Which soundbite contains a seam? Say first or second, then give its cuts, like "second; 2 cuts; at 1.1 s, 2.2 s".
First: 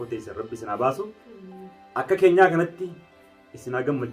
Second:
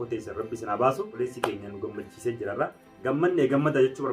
second; 2 cuts; at 1.1 s, 2.9 s